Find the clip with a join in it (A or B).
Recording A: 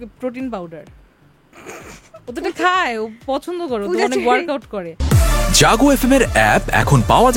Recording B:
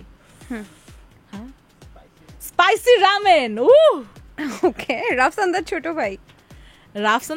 A